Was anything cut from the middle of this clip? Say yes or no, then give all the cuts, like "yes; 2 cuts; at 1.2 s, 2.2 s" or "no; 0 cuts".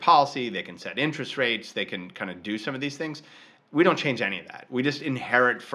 no; 0 cuts